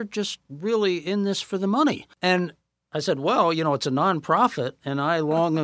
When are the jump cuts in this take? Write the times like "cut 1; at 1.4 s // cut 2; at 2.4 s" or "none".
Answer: cut 1; at 2.1 s